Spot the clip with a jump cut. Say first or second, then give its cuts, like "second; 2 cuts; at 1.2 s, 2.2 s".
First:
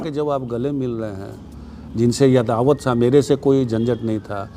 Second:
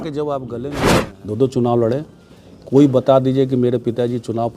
second; 1 cut; at 1.1 s